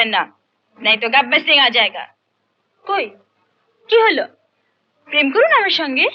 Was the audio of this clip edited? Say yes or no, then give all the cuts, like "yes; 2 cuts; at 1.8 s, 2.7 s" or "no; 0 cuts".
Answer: no; 0 cuts